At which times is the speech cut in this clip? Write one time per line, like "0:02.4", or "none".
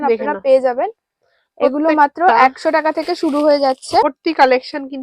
0:04.0